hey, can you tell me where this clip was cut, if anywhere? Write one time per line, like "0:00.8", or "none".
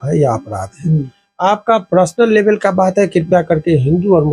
none